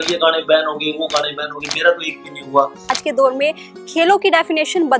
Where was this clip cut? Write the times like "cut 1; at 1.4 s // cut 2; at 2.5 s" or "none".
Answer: cut 1; at 2.9 s